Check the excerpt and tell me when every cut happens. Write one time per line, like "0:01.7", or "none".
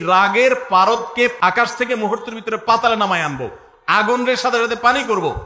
0:01.3